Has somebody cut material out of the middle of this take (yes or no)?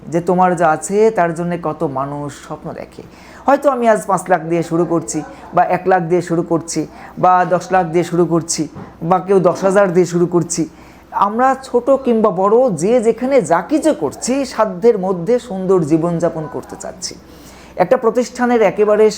no